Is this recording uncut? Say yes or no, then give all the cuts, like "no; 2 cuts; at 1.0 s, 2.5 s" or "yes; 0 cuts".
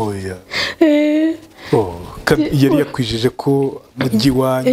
yes; 0 cuts